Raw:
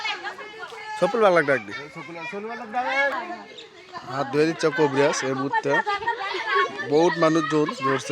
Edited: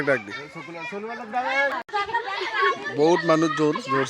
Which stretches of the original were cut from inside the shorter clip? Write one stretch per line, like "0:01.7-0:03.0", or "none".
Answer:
0:03.3-0:05.8